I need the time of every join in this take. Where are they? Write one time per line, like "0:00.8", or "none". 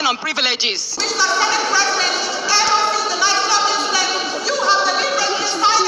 0:00.9